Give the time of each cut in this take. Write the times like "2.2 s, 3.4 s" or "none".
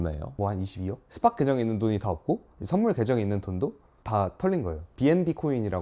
none